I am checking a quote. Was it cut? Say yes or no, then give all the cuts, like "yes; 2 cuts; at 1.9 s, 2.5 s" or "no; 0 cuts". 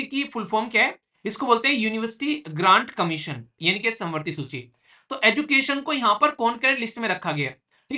yes; 1 cut; at 3.5 s